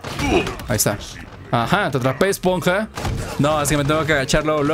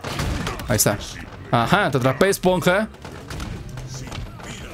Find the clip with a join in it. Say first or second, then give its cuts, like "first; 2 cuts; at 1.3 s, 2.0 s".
first; 1 cut; at 3.0 s